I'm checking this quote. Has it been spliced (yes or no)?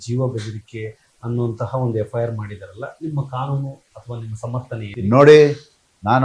yes